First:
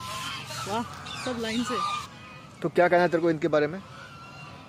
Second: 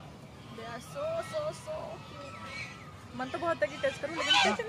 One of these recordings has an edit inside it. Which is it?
first; 1 cut; at 2.1 s

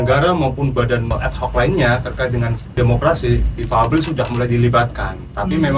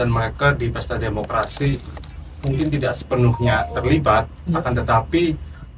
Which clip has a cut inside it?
first; 2 cuts; at 1.1 s, 2.6 s

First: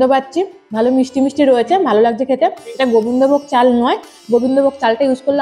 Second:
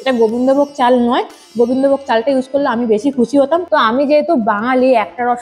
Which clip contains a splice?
second; 1 cut; at 3.6 s

